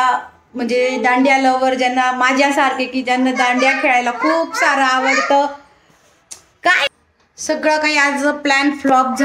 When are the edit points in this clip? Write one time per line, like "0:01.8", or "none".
0:06.8